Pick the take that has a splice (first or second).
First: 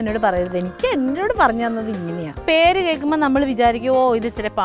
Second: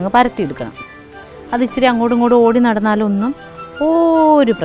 first